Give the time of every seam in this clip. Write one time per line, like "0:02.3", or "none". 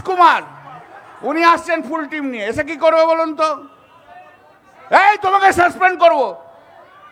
none